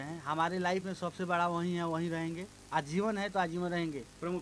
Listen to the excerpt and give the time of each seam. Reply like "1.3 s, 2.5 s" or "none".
none